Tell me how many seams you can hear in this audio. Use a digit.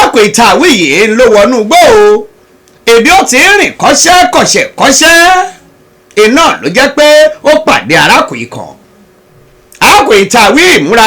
0